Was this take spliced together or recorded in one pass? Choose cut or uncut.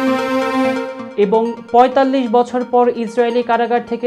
cut